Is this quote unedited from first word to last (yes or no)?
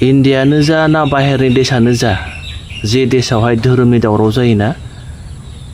yes